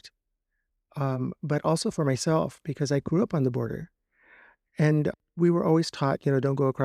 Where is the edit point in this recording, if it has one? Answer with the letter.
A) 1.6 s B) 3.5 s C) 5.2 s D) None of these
C